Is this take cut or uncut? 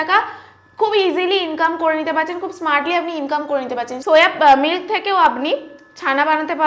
cut